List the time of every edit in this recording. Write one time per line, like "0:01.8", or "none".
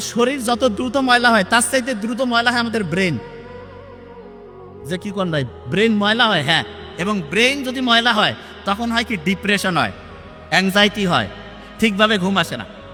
none